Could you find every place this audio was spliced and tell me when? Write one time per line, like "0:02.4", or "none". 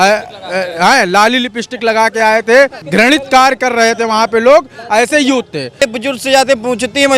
0:02.8
0:05.8